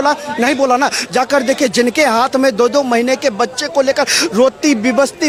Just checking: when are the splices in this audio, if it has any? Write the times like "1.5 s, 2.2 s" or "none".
none